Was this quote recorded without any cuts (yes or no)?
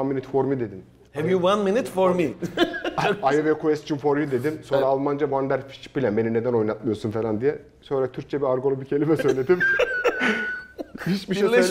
yes